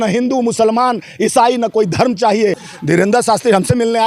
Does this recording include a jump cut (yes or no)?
yes